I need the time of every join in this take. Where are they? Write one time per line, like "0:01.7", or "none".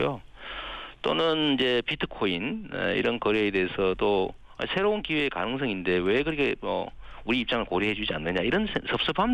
none